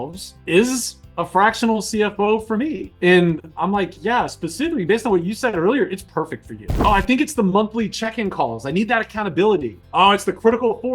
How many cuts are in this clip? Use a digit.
1